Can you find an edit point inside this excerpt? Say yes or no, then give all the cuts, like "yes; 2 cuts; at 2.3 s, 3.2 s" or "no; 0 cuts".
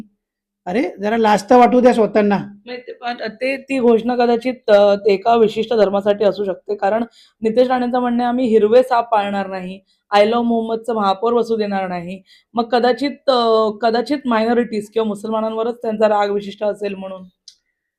no; 0 cuts